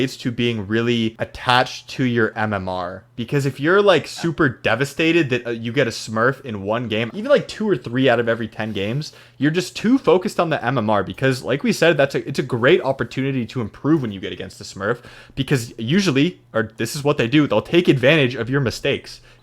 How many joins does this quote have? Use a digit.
2